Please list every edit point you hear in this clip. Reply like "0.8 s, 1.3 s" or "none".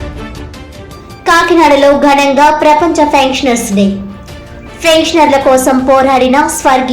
1.0 s